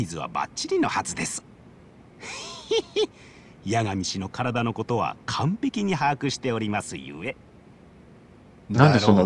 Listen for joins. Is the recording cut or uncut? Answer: uncut